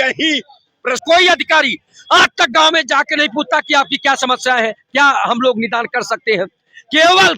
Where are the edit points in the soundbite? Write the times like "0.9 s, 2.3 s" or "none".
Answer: 1.0 s